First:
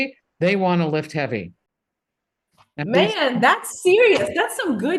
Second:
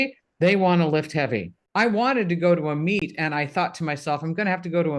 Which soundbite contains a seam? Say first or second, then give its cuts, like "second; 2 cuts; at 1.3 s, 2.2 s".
second; 1 cut; at 1.7 s